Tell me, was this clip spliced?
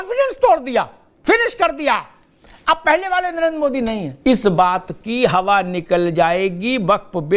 yes; 2 cuts; at 1.0 s, 4.1 s

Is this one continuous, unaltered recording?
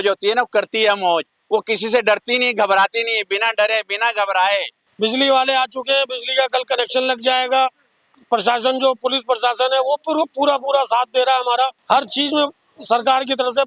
no; 3 cuts; at 4.8 s, 8.0 s, 11.8 s

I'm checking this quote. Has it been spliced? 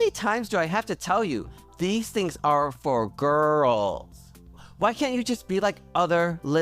yes; 1 cut; at 4.7 s

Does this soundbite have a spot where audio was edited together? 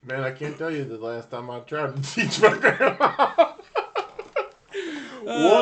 no; 0 cuts

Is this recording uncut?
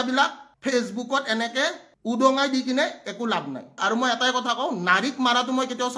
no; 1 cut; at 3.8 s

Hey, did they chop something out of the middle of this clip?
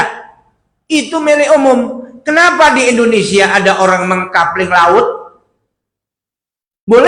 no; 0 cuts

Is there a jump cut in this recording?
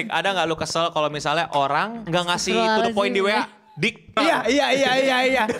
yes; 2 cuts; at 2.0 s, 4.2 s

